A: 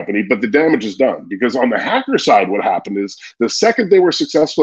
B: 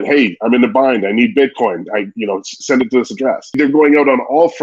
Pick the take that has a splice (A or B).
B